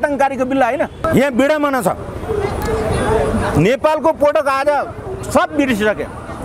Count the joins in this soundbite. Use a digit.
1